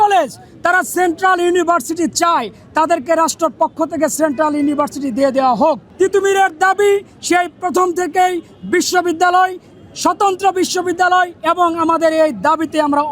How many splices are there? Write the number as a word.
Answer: one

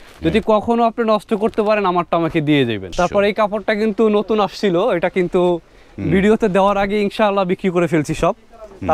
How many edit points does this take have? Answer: one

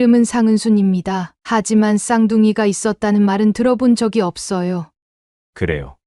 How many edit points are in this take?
one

